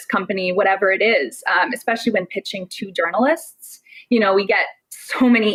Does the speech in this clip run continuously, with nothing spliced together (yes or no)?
yes